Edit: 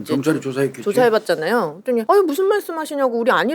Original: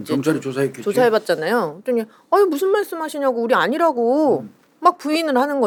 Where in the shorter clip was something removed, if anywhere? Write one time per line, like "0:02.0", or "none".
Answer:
0:02.0